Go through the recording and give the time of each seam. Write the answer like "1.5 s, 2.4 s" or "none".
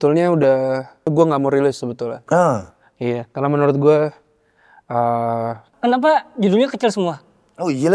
1.1 s, 5.7 s